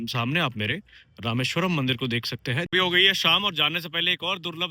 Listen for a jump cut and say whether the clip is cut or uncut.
cut